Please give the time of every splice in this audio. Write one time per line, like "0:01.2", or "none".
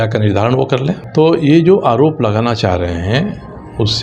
0:01.0